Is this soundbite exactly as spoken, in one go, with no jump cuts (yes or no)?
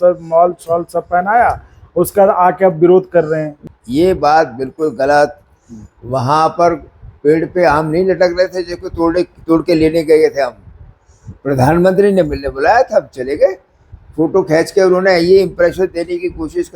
no